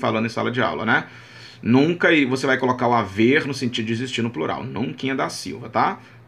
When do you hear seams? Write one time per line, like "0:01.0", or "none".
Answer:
none